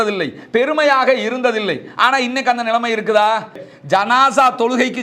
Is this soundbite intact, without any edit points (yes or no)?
no